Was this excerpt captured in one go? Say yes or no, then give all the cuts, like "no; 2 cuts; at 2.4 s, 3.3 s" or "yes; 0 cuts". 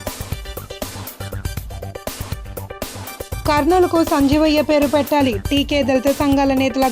yes; 0 cuts